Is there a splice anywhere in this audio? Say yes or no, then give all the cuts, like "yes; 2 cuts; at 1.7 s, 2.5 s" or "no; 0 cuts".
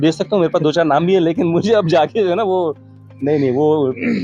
no; 0 cuts